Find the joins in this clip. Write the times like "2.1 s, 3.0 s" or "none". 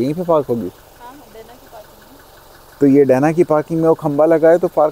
none